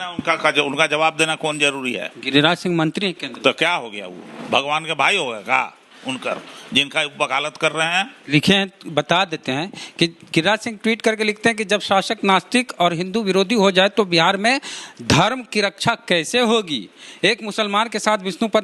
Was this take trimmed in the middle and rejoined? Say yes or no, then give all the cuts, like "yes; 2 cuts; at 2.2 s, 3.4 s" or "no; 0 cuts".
no; 0 cuts